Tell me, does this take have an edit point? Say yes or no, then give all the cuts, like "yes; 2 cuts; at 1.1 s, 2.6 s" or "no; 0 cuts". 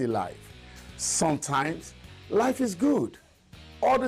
yes; 2 cuts; at 2.4 s, 3.0 s